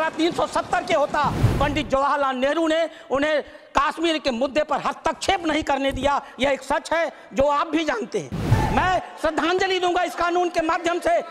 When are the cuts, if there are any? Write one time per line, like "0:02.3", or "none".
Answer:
0:01.5
0:08.5